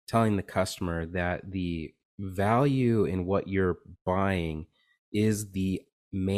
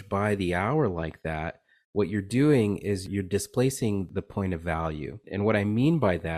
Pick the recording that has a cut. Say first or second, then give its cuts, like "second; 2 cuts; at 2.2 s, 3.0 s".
second; 3 cuts; at 3.1 s, 4.1 s, 5.3 s